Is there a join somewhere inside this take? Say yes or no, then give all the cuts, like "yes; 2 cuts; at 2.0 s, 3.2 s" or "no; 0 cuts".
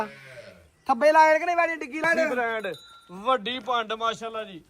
yes; 1 cut; at 2.0 s